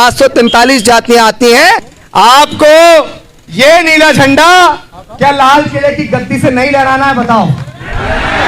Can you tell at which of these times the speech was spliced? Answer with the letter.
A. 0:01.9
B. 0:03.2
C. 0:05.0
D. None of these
A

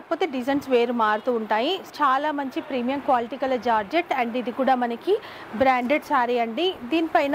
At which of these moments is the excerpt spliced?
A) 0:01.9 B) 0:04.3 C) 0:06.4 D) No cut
A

